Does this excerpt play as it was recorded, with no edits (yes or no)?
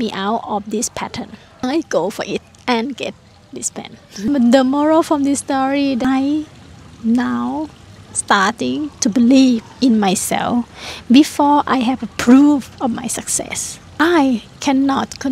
no